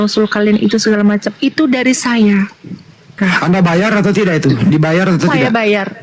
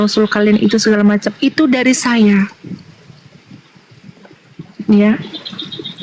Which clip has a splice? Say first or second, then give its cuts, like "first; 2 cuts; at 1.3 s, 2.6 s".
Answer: first; 1 cut; at 3.2 s